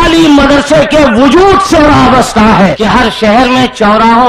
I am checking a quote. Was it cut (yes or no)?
yes